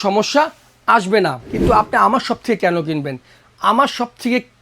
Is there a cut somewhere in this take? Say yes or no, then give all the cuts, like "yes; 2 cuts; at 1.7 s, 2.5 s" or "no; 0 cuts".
yes; 1 cut; at 1.5 s